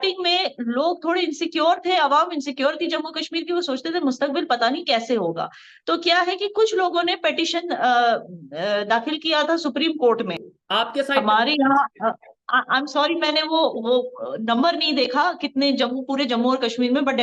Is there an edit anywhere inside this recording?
yes; 1 cut; at 10.5 s

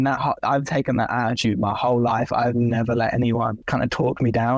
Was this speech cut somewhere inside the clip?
yes; 1 cut; at 3.6 s

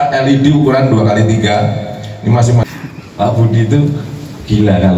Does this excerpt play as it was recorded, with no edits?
no; 1 cut; at 2.6 s

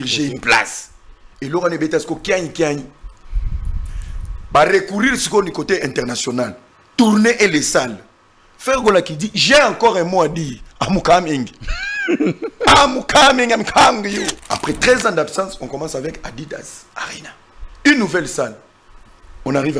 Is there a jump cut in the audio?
yes; 1 cut; at 14.4 s

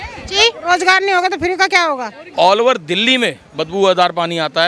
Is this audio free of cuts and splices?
no; 1 cut; at 2.2 s

